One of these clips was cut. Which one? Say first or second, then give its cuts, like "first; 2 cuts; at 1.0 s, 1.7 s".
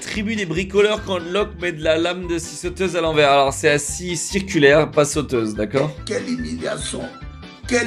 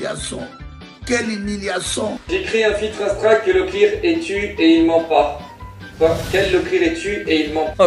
second; 1 cut; at 2.2 s